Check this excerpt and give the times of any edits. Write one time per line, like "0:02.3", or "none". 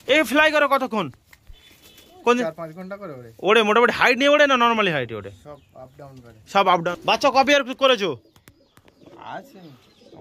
0:06.9